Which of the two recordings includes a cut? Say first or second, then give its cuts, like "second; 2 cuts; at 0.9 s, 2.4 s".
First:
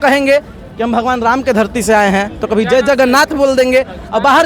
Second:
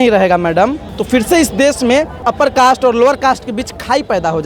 second; 2 cuts; at 0.9 s, 2.3 s